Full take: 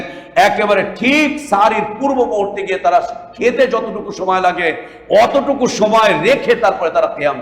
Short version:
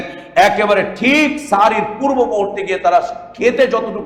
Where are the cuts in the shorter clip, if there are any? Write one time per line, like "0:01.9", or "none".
none